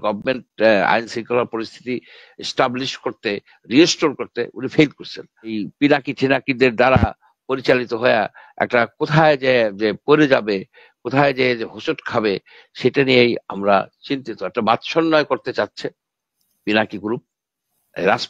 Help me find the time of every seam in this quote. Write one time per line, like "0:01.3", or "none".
0:05.7

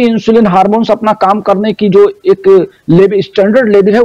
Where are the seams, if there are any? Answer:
none

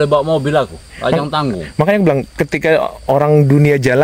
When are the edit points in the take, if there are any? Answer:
none

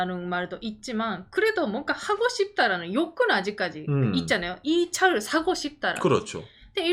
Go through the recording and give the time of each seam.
none

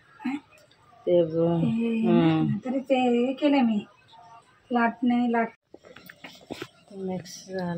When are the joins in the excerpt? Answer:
0:05.5

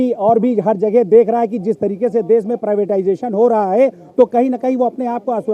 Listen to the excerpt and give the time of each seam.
none

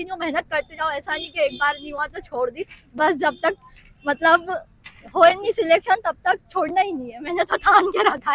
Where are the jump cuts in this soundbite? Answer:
none

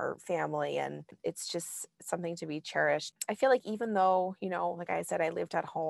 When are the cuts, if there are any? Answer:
0:01.1
0:03.1

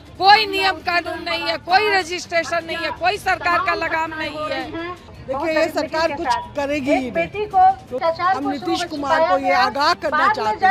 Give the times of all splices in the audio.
0:05.1
0:07.9

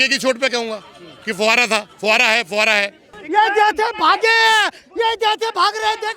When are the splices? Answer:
0:03.2

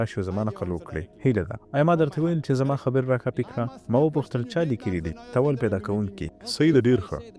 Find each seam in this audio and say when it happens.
none

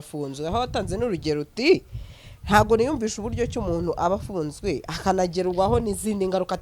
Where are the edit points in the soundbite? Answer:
none

